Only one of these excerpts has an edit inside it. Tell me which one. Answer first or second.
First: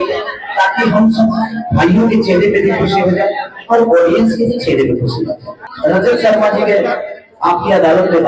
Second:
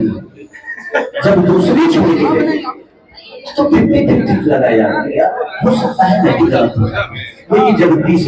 first